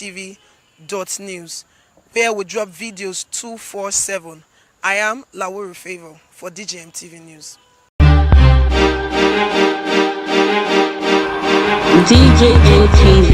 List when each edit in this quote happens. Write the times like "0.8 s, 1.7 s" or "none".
7.9 s